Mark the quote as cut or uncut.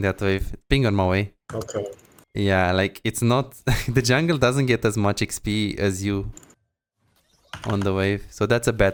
uncut